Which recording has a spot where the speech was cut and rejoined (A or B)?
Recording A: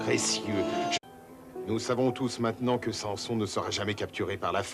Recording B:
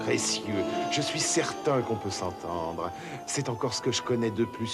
B